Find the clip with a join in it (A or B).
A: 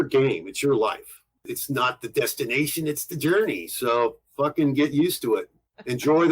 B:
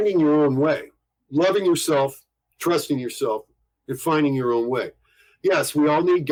A